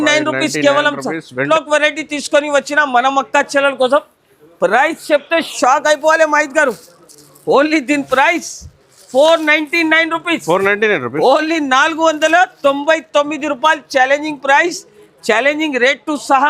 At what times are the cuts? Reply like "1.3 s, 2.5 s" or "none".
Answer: 1.4 s